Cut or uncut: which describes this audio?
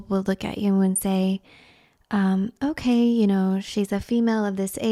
uncut